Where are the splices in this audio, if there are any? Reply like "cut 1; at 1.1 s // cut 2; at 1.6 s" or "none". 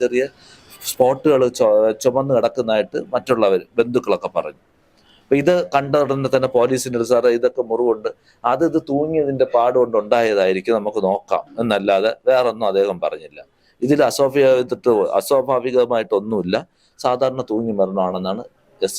none